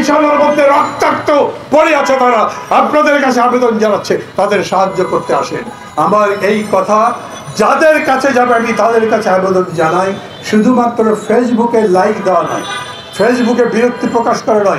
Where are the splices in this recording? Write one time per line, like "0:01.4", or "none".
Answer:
none